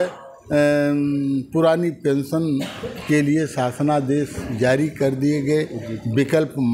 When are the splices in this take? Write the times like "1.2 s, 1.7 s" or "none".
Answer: none